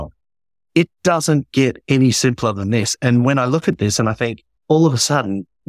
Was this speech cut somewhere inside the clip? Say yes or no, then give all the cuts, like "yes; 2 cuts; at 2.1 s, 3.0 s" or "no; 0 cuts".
yes; 1 cut; at 4.5 s